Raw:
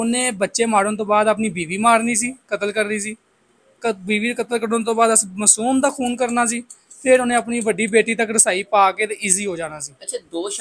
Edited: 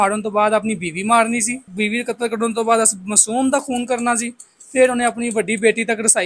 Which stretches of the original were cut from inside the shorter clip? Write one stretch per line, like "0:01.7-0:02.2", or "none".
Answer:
0:02.4-0:04.0